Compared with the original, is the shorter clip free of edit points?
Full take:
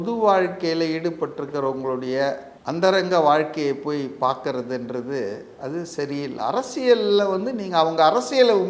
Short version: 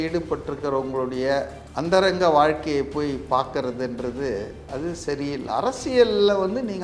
yes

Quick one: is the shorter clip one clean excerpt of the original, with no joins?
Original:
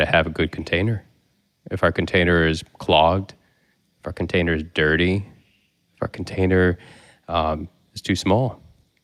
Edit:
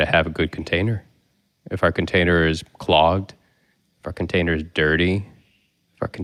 yes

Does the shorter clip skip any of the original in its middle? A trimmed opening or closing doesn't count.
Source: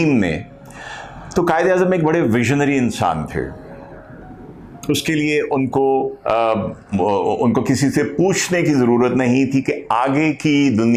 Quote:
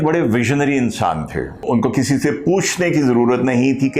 yes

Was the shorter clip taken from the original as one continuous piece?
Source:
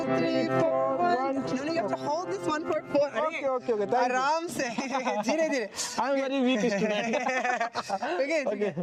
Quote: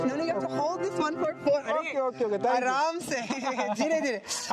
yes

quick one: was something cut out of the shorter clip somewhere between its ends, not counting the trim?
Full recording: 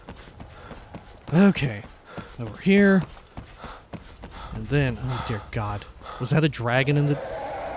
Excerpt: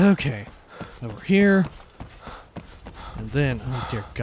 no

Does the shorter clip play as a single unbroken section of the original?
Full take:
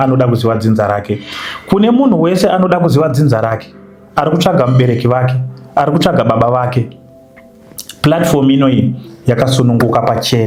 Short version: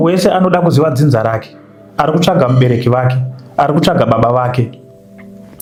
yes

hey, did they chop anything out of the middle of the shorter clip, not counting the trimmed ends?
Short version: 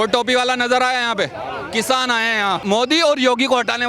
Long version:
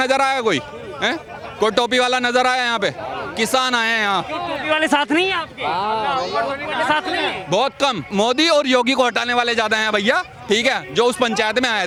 yes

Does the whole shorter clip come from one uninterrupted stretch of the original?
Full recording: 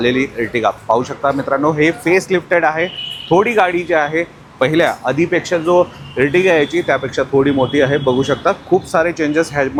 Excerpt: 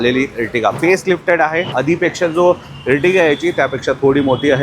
no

